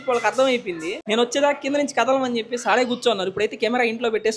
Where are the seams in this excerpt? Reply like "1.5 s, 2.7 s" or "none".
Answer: 0.9 s